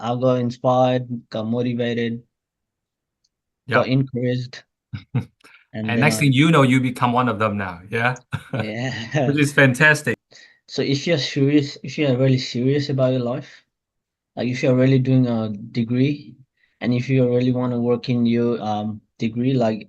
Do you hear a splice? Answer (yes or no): yes